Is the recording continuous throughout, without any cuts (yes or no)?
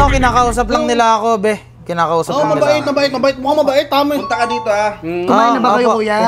yes